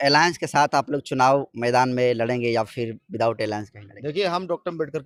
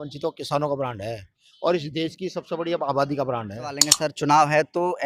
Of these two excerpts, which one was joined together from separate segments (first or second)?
second